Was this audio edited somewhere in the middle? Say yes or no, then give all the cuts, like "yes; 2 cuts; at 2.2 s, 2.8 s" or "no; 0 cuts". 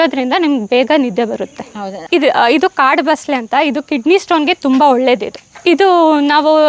yes; 2 cuts; at 1.7 s, 5.6 s